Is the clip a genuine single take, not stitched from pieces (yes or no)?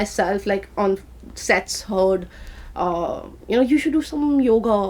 yes